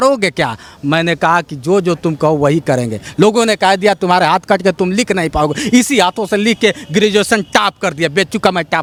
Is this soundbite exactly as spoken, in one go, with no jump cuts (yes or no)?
yes